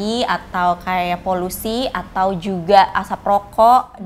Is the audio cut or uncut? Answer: uncut